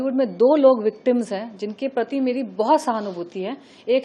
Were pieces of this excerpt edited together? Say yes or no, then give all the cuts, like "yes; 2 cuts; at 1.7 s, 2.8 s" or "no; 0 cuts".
no; 0 cuts